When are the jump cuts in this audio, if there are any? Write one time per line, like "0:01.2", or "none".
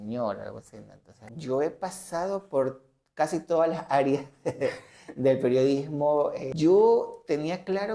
0:01.3
0:06.5